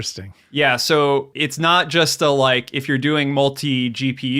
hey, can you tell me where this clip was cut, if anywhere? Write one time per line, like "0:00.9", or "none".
0:01.4